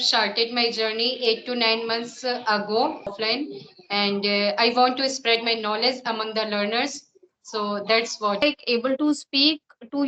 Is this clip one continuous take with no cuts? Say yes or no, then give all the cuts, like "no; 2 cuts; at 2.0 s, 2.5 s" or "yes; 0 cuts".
no; 2 cuts; at 3.1 s, 8.4 s